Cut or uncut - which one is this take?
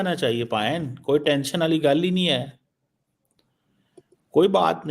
uncut